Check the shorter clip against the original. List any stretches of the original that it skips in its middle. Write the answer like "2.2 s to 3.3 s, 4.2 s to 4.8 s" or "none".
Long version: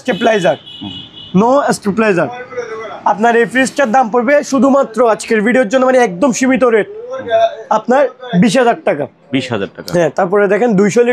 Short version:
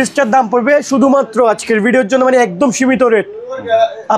none